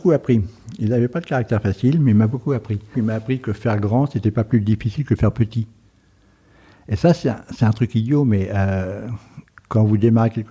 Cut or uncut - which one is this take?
cut